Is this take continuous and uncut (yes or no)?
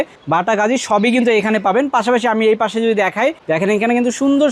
yes